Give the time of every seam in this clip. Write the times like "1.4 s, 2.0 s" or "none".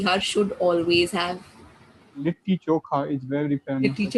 2.2 s